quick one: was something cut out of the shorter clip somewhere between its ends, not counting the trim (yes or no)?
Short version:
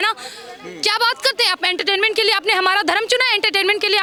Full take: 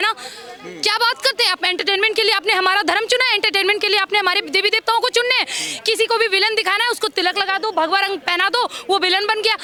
no